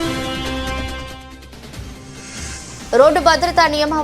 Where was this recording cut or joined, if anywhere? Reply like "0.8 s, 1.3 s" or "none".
2.5 s